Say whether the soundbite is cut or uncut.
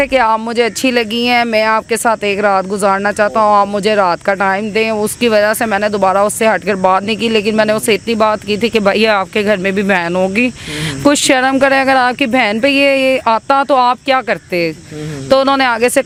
uncut